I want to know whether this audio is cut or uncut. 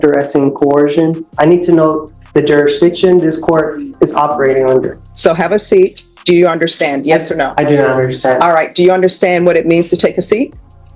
cut